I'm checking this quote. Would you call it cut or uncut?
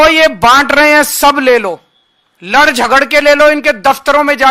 uncut